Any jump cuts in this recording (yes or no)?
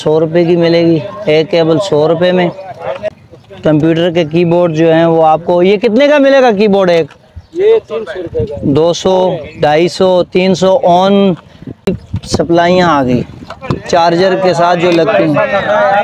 yes